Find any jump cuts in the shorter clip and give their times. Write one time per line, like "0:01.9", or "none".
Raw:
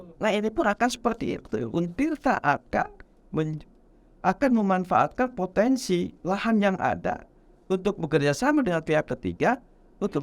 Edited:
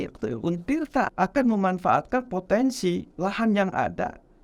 0:01.1